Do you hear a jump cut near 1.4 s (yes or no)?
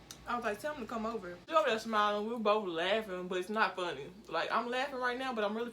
yes